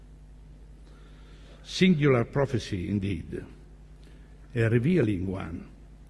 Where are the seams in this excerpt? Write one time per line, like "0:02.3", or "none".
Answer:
0:03.1